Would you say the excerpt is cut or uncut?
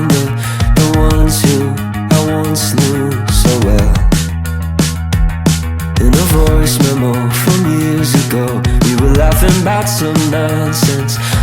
cut